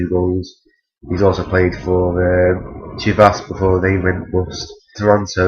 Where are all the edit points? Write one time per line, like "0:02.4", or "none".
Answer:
0:01.1